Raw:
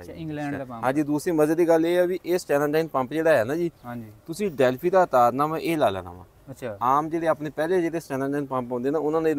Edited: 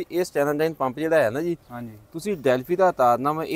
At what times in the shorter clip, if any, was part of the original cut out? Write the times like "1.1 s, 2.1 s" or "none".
none